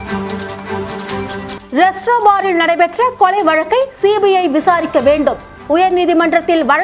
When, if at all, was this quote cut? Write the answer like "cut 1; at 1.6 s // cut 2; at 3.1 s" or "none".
cut 1; at 1.5 s